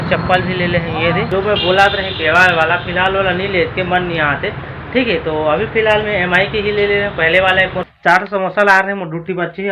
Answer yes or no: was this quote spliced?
yes